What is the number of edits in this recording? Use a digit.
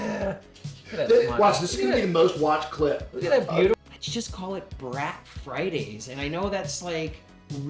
1